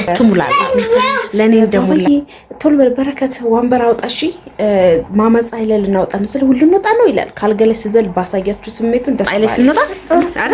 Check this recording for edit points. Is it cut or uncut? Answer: cut